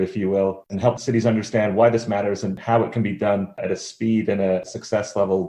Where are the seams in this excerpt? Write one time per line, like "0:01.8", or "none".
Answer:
0:01.0
0:02.6
0:03.6
0:04.7